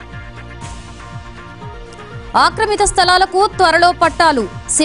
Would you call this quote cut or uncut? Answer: cut